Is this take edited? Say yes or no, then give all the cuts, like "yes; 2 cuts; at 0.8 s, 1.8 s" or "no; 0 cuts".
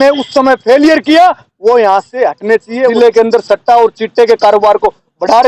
yes; 1 cut; at 2.9 s